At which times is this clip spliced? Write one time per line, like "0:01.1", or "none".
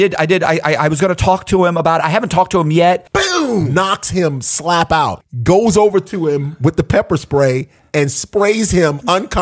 0:03.4
0:05.2